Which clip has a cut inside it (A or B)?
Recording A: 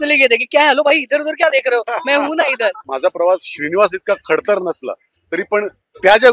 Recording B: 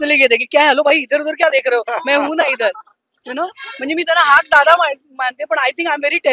A